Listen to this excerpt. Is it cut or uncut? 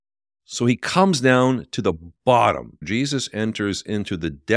cut